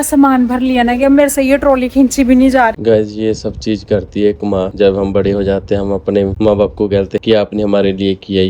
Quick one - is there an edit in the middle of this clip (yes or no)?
yes